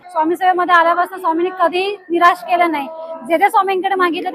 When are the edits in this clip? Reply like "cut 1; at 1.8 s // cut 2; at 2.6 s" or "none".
none